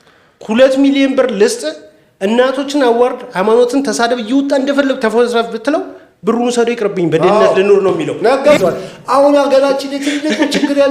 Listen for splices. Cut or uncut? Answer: cut